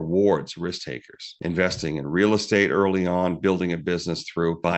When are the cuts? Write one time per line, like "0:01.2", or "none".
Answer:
0:01.3